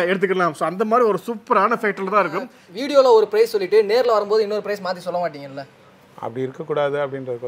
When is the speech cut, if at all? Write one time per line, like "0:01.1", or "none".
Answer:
0:02.6